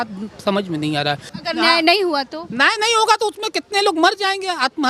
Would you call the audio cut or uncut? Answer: cut